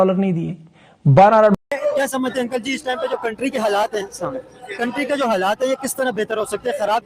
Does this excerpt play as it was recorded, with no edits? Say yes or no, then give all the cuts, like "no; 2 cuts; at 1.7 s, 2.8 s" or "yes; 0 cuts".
no; 1 cut; at 1.6 s